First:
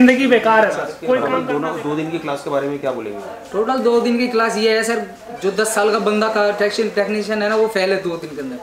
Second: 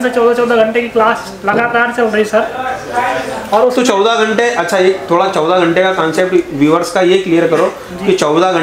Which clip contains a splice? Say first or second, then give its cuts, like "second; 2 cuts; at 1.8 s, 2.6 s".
first; 1 cut; at 1.3 s